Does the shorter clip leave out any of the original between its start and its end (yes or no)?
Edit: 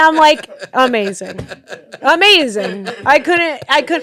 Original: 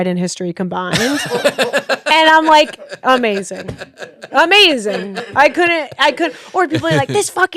no